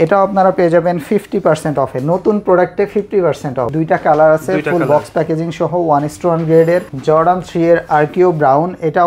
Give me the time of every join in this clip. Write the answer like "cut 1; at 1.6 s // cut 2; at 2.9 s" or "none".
cut 1; at 3.7 s // cut 2; at 6.9 s